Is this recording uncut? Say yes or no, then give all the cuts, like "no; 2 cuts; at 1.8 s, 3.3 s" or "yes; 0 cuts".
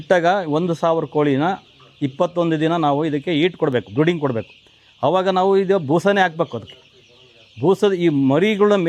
yes; 0 cuts